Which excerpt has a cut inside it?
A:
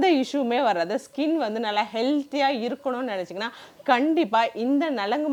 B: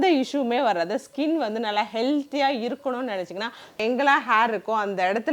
B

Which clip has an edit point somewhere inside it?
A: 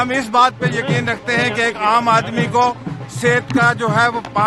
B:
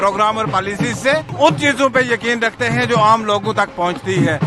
B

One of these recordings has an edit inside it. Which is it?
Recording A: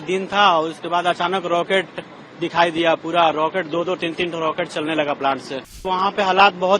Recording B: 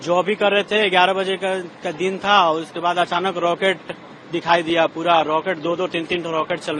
A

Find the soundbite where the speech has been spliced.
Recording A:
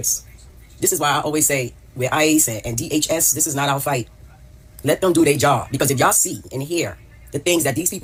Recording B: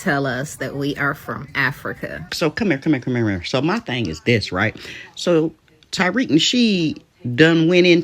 B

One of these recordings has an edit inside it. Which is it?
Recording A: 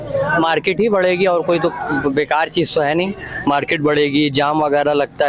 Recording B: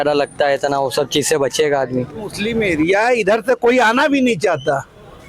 B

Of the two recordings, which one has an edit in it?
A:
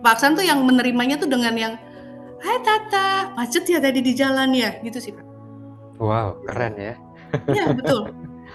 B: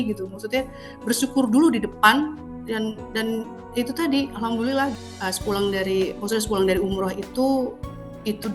B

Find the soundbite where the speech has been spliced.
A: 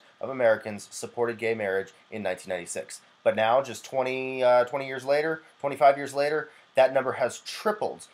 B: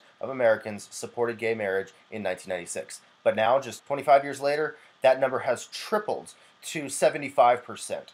B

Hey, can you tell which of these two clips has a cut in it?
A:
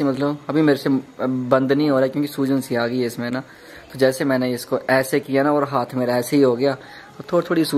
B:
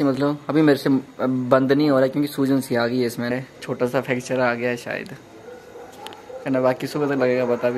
B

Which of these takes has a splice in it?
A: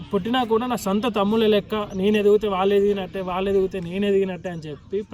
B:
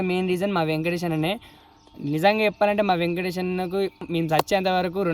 B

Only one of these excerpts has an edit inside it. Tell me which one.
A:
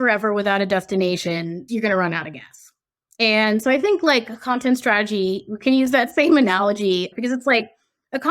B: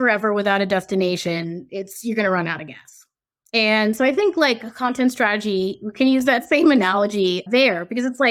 A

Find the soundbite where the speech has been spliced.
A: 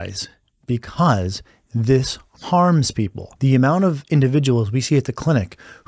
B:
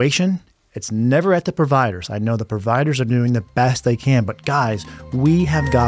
A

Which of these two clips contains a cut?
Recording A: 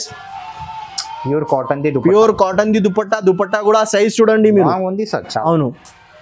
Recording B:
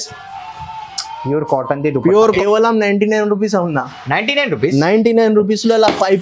B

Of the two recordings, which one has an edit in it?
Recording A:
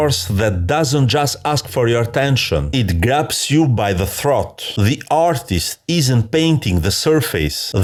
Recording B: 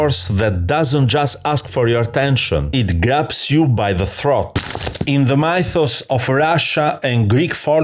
B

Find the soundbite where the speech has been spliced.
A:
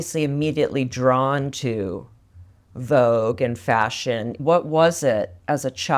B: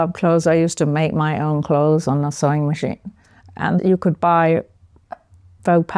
A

